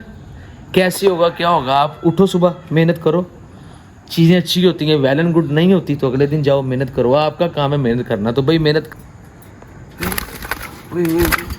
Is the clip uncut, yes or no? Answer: no